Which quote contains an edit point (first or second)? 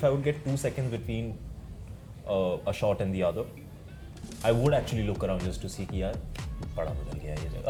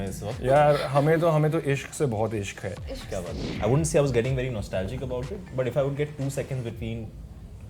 second